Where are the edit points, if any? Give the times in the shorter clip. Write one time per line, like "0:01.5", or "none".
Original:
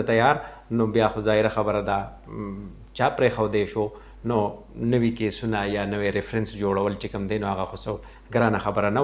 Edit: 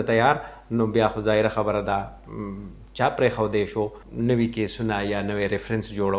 0:04.0